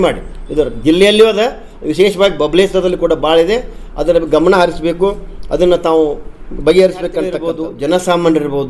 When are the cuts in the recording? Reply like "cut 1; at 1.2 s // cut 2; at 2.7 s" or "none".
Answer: cut 1; at 7.4 s

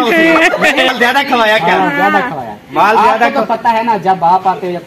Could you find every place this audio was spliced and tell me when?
cut 1; at 0.9 s

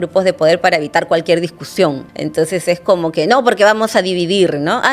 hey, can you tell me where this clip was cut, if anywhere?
cut 1; at 2.0 s

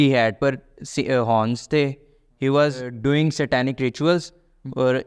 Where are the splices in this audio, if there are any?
cut 1; at 2.9 s

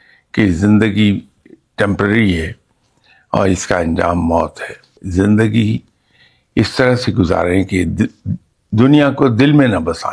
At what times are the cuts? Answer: cut 1; at 4.9 s

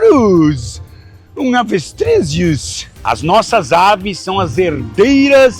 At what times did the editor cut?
cut 1; at 2.9 s

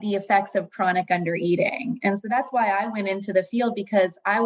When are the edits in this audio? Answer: none

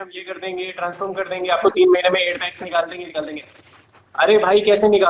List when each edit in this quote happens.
none

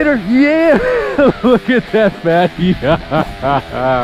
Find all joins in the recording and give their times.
none

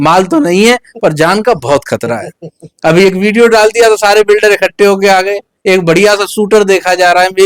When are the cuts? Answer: none

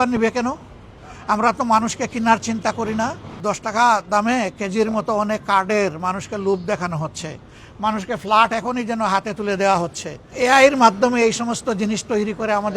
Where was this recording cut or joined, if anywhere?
cut 1; at 3.3 s // cut 2; at 10.2 s

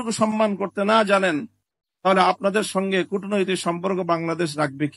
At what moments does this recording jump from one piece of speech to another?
none

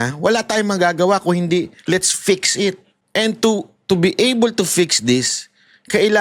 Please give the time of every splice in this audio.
cut 1; at 2.9 s

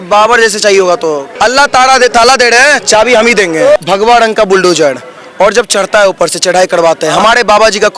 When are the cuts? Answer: cut 1; at 1.3 s // cut 2; at 3.8 s

